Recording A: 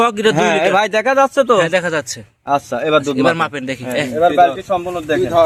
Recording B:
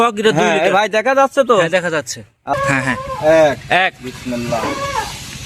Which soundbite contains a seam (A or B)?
B